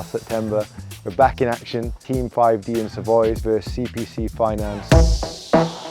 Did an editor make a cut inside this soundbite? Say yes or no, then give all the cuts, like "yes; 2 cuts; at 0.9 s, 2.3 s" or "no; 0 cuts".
yes; 3 cuts; at 2.0 s, 3.4 s, 4.8 s